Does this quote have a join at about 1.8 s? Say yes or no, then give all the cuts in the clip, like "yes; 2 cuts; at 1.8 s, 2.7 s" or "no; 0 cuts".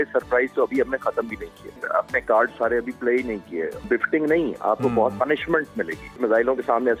yes; 3 cuts; at 1.8 s, 3.8 s, 6.2 s